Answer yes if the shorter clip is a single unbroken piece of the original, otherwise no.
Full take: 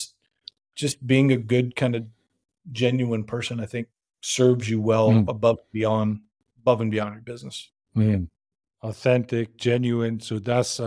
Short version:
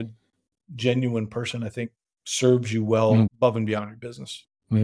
no